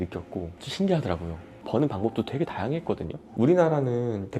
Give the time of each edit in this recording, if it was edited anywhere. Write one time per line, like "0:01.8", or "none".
0:01.5
0:03.2